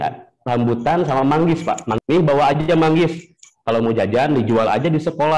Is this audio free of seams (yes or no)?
no